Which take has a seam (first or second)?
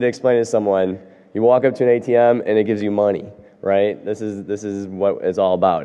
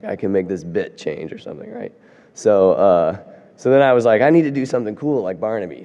first